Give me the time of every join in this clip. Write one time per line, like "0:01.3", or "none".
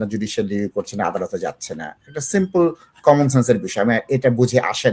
none